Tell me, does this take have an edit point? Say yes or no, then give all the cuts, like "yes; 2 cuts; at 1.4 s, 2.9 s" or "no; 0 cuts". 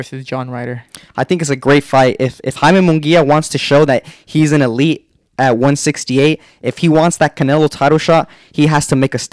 yes; 1 cut; at 1.0 s